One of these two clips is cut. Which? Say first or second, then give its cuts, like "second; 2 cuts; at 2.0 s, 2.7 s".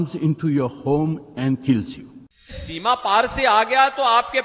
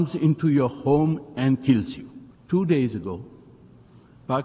first; 1 cut; at 2.5 s